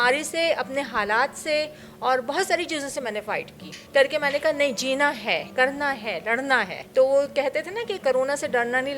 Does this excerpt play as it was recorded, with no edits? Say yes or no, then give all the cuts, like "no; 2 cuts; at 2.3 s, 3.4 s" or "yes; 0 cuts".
yes; 0 cuts